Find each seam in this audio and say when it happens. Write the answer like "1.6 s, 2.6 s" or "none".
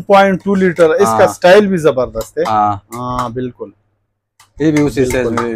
none

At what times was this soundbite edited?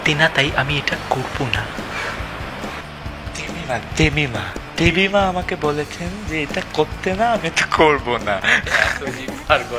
none

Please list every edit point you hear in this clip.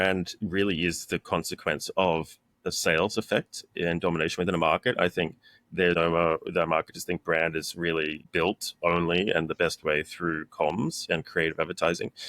5.9 s, 8.2 s

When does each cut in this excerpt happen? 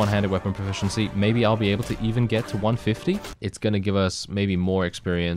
3.4 s

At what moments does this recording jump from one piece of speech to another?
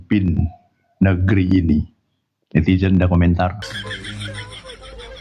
none

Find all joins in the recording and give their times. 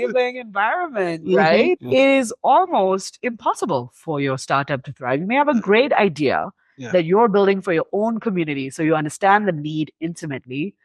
1.8 s

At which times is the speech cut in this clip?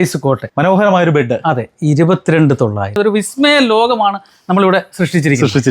2.8 s

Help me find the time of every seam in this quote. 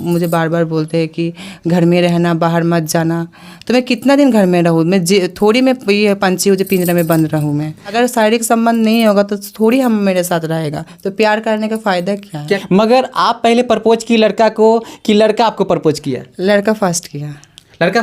7.9 s, 12.6 s

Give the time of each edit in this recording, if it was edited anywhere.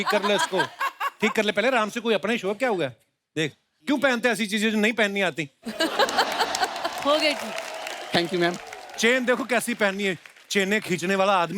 none

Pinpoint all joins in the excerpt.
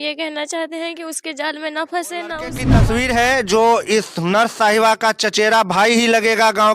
2.7 s

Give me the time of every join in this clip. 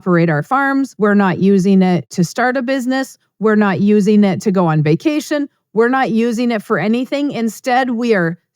0.9 s

